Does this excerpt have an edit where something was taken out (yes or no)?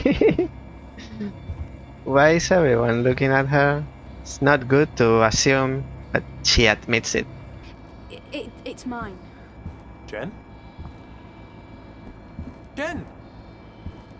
yes